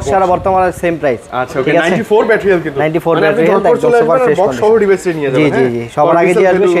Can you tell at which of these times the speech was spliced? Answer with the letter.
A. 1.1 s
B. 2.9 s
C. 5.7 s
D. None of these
D